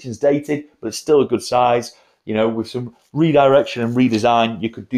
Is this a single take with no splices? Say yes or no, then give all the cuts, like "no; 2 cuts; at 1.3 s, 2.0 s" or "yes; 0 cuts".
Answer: yes; 0 cuts